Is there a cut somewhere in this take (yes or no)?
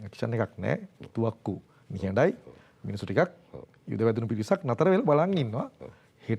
no